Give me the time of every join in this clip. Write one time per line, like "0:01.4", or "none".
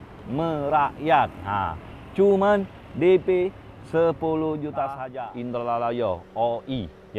0:05.0